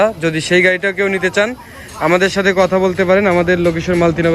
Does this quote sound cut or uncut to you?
uncut